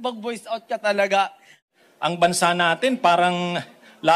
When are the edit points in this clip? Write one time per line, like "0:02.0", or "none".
0:01.6